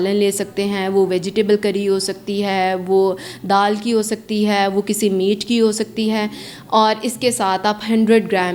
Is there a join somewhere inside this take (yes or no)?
no